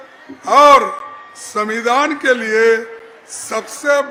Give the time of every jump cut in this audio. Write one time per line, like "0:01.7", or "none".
none